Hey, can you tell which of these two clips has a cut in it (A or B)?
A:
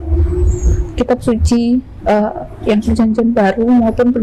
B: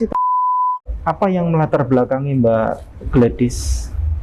B